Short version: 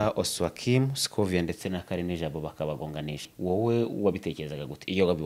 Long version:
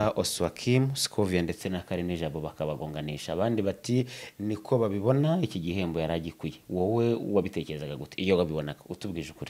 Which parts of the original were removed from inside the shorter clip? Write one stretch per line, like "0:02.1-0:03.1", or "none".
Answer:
0:03.2-0:06.5

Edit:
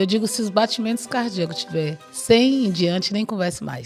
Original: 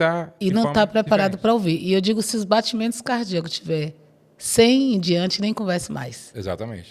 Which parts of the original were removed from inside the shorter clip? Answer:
0:04.0-0:04.3

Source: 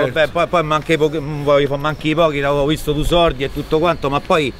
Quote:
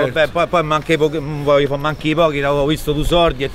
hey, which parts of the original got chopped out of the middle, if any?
none

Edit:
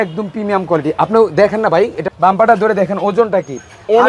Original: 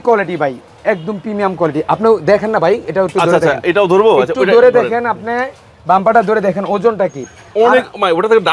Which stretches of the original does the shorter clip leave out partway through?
0:02.9-0:05.6

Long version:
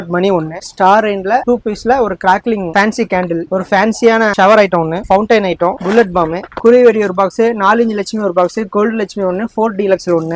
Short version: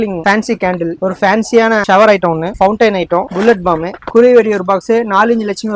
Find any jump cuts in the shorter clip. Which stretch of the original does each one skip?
none

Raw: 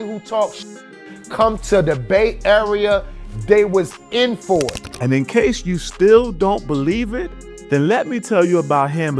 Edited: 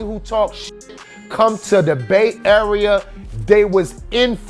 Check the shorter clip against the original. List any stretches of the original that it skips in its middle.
none

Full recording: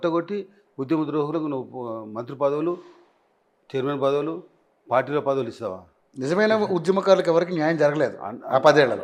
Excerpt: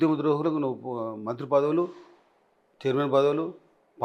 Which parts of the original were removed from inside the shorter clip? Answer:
none

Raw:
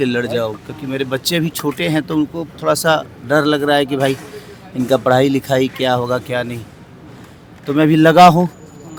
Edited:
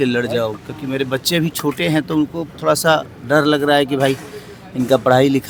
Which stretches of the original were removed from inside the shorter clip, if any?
none

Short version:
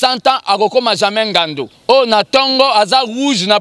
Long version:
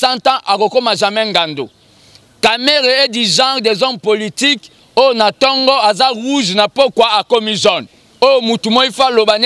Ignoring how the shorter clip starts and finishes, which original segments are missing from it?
0:01.7-0:04.7

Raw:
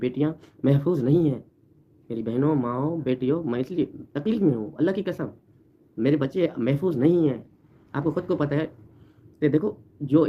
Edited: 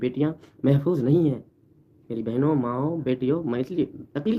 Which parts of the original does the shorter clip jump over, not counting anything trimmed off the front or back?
none

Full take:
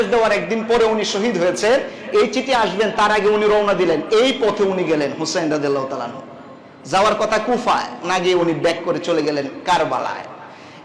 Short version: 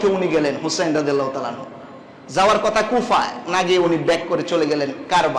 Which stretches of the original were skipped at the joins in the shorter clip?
none

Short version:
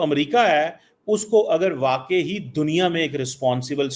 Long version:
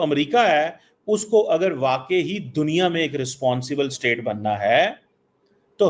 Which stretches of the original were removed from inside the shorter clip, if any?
none

